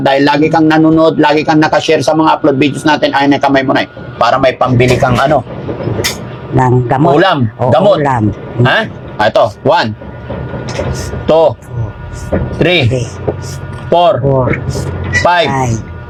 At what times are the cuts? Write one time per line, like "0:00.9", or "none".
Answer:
none